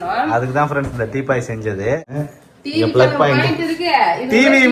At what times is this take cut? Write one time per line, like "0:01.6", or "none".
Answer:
0:02.0